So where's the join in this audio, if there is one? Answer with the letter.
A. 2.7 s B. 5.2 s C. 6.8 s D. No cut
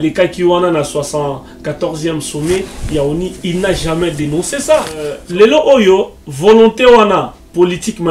B